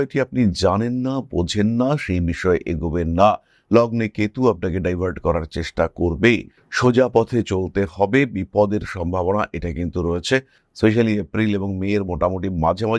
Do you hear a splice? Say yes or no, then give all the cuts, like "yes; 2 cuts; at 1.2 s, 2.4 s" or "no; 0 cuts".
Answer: no; 0 cuts